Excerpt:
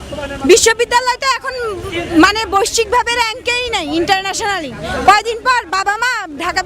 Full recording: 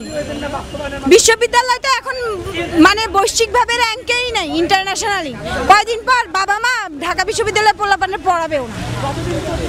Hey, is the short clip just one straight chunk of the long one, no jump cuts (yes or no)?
yes